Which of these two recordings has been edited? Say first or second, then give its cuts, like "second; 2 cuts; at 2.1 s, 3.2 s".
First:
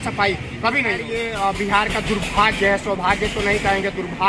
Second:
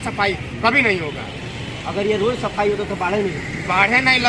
first; 1 cut; at 1.1 s